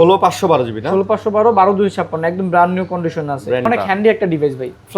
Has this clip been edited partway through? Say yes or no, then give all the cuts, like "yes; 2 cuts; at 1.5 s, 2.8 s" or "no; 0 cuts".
yes; 1 cut; at 3.7 s